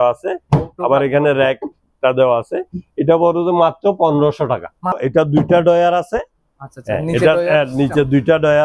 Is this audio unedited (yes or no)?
no